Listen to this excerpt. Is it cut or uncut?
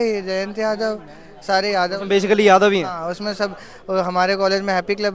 uncut